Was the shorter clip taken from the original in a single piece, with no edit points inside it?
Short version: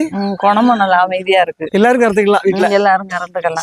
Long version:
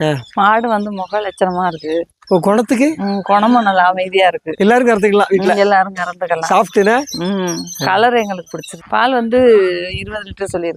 yes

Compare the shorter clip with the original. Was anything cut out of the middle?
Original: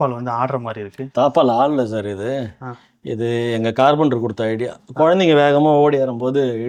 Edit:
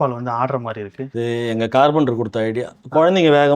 yes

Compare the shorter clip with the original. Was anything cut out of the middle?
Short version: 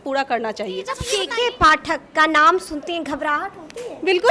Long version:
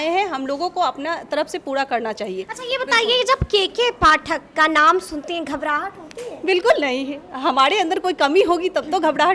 yes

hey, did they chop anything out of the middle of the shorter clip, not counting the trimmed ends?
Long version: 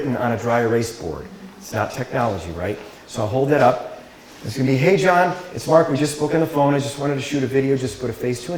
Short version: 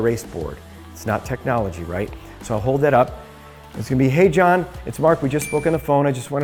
no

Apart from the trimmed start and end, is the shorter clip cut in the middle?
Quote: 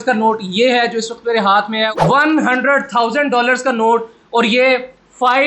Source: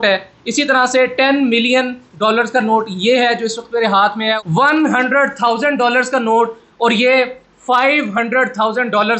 no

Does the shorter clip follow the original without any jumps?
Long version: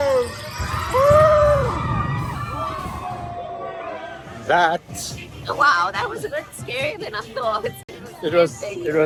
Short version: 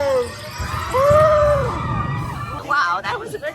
no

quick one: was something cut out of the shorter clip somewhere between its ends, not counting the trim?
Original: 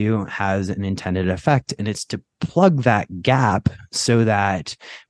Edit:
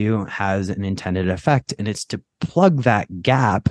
no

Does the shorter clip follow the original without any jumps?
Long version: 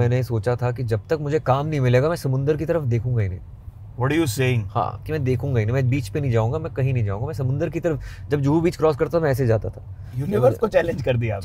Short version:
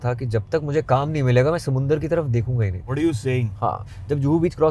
no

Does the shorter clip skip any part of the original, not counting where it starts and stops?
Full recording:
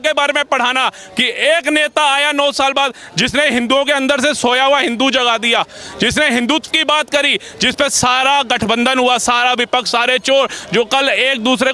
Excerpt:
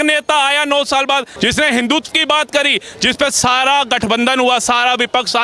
yes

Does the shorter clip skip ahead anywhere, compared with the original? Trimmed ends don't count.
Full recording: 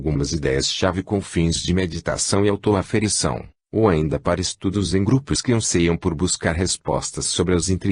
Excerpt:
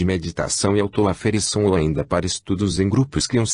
yes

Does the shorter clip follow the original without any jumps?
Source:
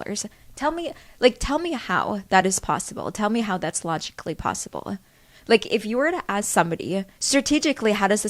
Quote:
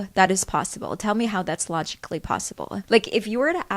no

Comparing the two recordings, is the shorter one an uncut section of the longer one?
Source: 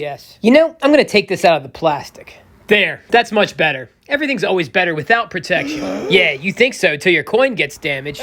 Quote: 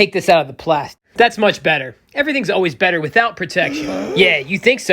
no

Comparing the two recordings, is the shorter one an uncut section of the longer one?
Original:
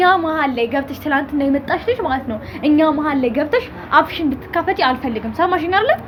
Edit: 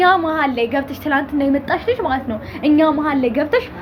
yes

